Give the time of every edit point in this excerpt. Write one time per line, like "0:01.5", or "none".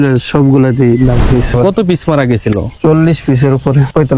0:01.5

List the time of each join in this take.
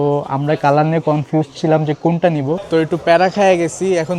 0:02.6

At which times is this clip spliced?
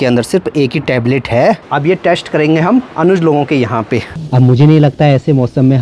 0:01.6
0:04.2

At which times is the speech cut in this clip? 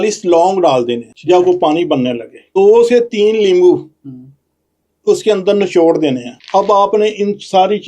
0:01.1
0:02.5
0:06.3

